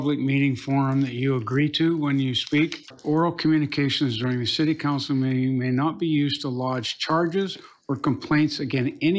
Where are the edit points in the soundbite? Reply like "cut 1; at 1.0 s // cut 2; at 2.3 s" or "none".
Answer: cut 1; at 2.9 s